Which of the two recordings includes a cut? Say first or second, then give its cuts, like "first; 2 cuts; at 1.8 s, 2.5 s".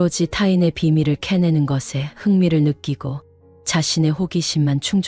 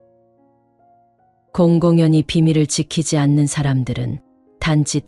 second; 1 cut; at 1.5 s